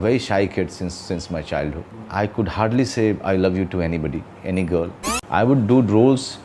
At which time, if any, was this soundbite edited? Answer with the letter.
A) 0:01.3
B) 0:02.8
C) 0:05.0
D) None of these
C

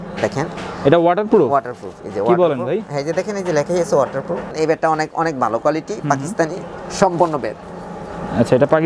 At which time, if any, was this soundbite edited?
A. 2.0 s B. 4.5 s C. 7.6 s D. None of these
B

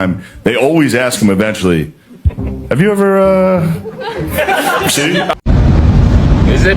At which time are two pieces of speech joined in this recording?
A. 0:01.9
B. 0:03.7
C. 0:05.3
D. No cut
C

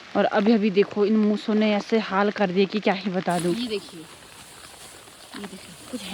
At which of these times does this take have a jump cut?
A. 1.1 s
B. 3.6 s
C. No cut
B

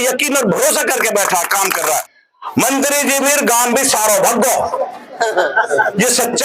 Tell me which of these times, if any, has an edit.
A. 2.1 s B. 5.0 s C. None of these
A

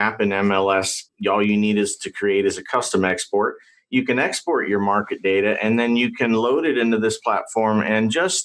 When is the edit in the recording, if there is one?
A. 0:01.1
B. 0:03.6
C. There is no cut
A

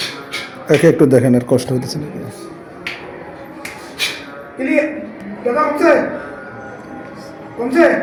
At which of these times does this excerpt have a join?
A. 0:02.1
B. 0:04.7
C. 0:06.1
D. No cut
D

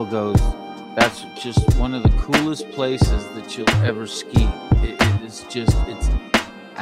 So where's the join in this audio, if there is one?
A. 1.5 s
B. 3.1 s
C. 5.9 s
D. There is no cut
D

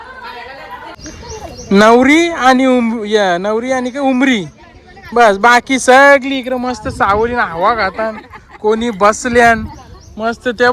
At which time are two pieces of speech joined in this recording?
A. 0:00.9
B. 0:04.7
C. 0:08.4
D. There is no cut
A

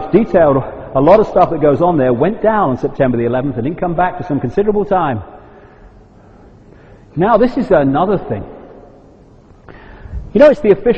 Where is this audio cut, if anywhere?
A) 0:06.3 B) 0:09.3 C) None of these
B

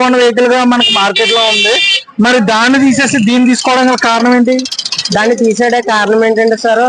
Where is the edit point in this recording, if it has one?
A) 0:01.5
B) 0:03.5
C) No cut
C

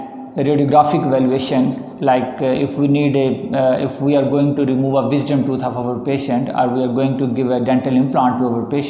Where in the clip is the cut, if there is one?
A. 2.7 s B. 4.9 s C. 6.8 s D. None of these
D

